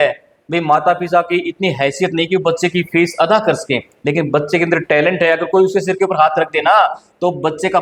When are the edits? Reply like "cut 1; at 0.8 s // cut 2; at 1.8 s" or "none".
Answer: none